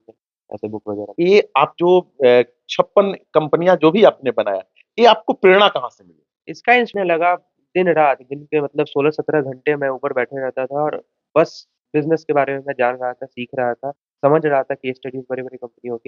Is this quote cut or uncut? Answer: cut